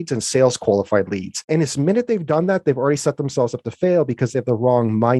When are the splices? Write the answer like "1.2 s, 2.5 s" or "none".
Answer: 1.4 s